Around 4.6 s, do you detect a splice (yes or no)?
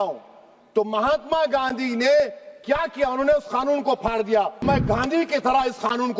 yes